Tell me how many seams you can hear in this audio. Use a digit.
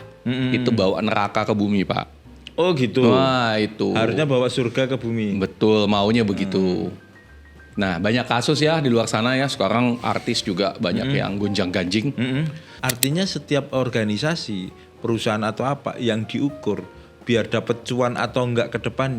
1